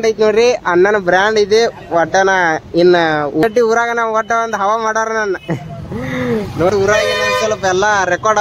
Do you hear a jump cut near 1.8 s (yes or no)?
no